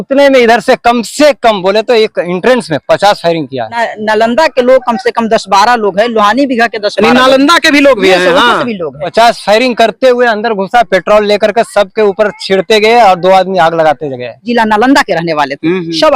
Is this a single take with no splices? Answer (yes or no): no